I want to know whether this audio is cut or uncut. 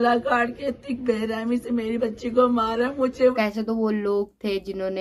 cut